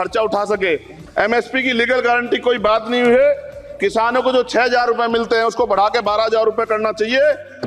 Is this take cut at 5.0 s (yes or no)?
no